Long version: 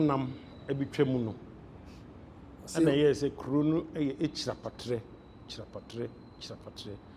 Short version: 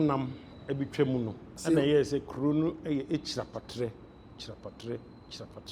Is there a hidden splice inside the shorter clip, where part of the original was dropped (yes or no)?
yes